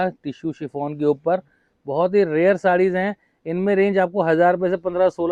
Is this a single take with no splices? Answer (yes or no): yes